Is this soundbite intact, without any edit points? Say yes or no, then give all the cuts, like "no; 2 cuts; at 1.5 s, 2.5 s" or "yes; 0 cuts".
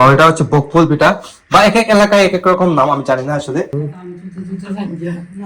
no; 1 cut; at 3.7 s